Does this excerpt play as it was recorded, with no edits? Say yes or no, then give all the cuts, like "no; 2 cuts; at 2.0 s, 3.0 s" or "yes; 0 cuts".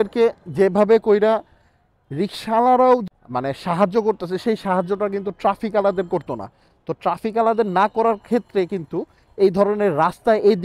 yes; 0 cuts